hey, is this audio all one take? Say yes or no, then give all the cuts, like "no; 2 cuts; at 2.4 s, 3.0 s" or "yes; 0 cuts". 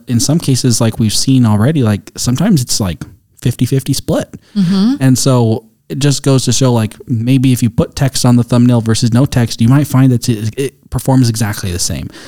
yes; 0 cuts